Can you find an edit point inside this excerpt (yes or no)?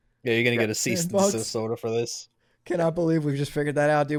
no